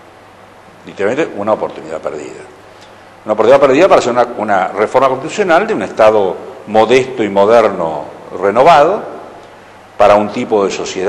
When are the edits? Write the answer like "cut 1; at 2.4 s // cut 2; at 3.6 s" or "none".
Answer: none